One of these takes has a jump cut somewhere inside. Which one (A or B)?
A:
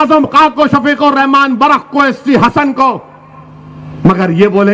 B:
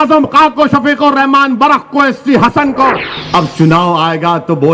B